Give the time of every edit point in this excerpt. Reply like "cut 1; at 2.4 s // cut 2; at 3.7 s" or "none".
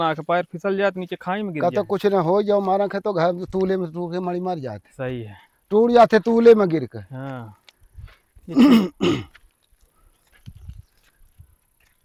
none